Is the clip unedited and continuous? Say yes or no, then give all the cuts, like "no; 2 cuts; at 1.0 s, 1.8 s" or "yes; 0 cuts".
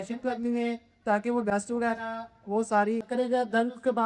no; 1 cut; at 3.1 s